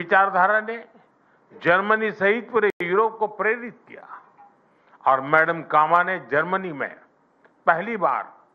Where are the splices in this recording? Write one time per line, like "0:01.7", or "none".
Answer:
none